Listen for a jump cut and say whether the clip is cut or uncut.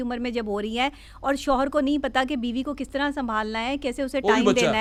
uncut